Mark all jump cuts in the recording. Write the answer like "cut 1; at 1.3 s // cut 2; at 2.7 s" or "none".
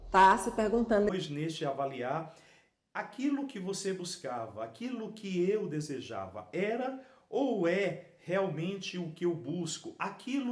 cut 1; at 1.1 s